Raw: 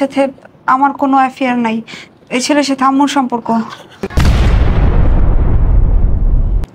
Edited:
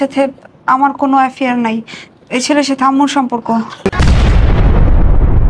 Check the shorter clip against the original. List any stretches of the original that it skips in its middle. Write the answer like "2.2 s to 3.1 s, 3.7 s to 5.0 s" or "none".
3.7 s to 3.9 s